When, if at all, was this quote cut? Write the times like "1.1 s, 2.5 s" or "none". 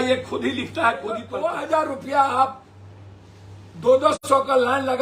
1.3 s